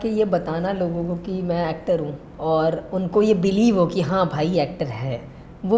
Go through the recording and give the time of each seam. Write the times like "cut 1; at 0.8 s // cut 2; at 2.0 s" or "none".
cut 1; at 2.2 s